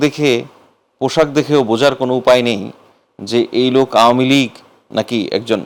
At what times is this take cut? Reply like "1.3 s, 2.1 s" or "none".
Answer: none